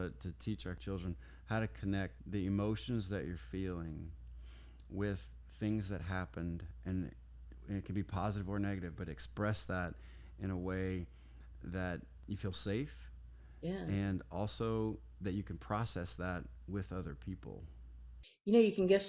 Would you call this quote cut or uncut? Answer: cut